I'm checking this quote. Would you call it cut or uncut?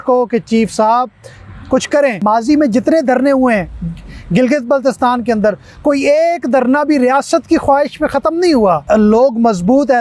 cut